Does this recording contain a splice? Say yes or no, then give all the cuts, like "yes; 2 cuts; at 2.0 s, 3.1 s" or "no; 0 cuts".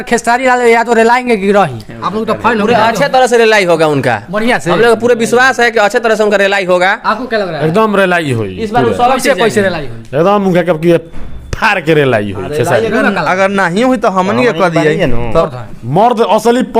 yes; 1 cut; at 15.4 s